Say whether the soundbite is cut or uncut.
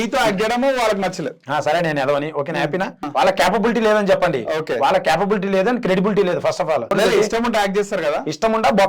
cut